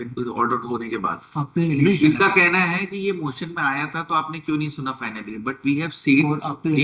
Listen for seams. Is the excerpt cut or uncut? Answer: uncut